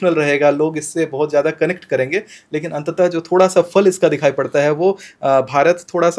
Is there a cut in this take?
no; 0 cuts

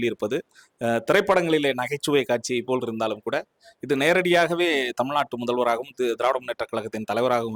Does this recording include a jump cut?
no; 0 cuts

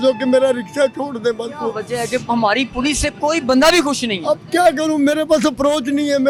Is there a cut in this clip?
no; 0 cuts

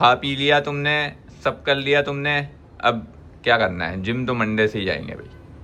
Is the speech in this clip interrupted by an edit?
no; 0 cuts

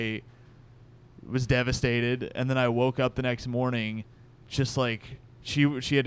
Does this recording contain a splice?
no; 0 cuts

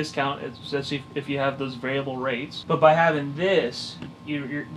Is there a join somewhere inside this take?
yes; 1 cut; at 2.5 s

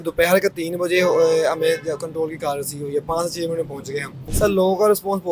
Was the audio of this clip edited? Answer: yes; 1 cut; at 4.2 s

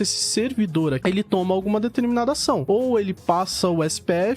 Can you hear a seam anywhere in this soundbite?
yes; 1 cut; at 1.0 s

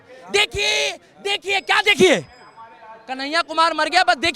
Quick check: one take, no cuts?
yes; 0 cuts

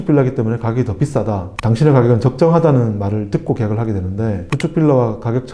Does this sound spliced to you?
yes; 2 cuts; at 1.5 s, 4.5 s

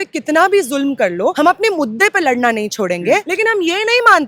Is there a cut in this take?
yes; 2 cuts; at 1.3 s, 3.3 s

